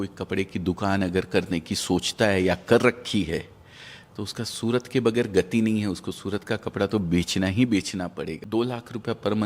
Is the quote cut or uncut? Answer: cut